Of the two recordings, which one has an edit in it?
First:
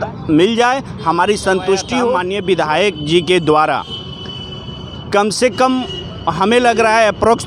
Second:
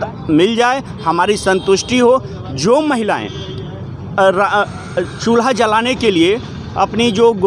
first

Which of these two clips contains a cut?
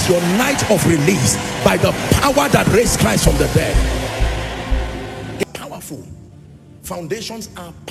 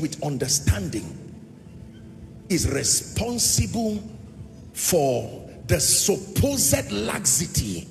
first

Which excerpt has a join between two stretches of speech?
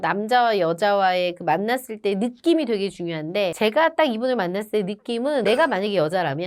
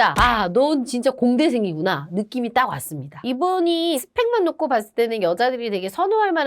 second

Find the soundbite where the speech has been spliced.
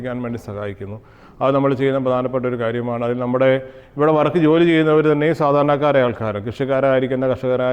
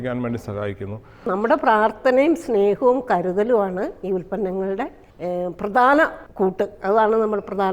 second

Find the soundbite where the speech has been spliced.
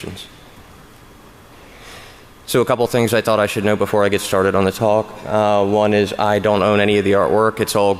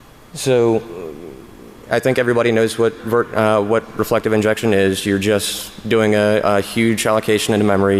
first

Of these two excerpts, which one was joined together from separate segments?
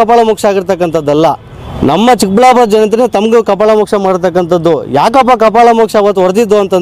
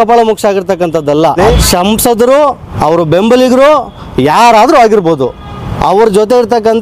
second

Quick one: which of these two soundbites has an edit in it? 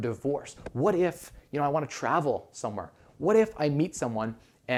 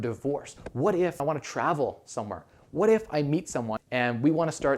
second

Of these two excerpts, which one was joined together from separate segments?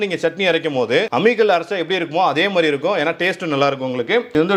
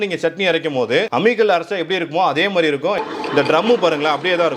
second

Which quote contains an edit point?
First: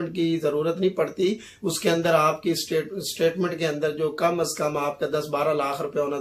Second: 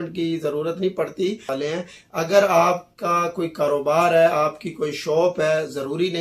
second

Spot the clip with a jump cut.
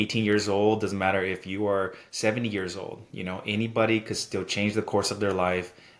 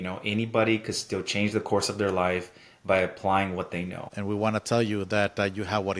second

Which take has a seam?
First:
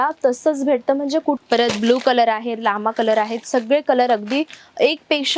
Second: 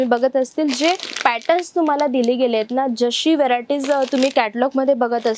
first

